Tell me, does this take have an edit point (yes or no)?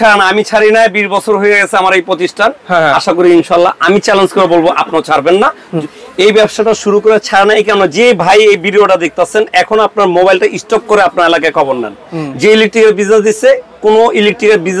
no